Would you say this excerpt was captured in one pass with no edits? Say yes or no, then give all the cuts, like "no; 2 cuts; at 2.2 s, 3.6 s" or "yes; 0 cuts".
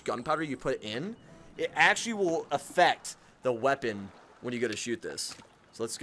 yes; 0 cuts